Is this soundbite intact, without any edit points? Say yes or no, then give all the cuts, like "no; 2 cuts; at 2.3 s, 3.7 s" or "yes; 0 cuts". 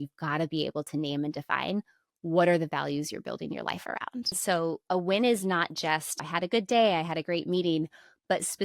no; 2 cuts; at 4.3 s, 6.2 s